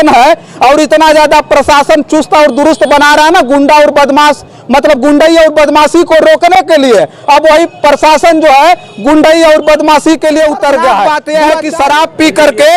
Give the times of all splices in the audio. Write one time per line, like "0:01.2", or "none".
0:11.0

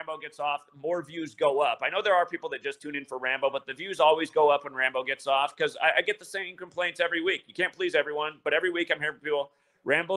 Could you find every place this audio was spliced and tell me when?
none

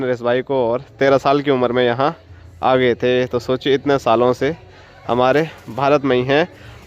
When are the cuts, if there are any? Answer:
none

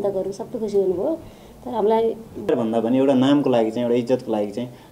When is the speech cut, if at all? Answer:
0:02.5

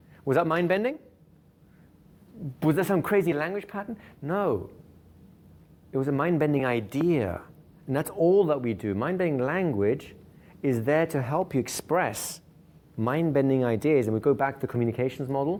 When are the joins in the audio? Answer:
none

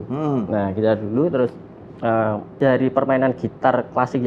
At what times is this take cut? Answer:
0:02.5

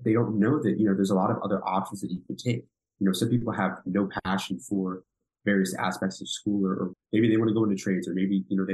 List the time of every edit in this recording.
0:06.9

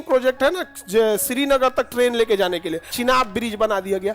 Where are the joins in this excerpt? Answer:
0:02.9

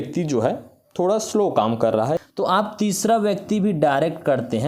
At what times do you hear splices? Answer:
0:02.2

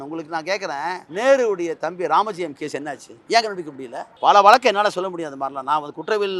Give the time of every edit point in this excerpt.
0:01.0
0:03.3
0:04.3

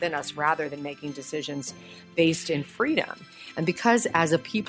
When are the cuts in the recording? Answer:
none

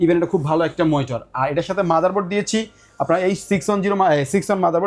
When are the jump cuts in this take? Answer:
none

